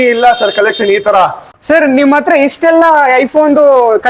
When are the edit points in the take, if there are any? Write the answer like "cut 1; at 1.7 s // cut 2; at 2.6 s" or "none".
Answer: none